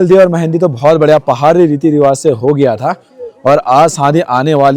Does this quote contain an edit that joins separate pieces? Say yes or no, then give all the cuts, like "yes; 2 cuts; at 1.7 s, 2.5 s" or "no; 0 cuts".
no; 0 cuts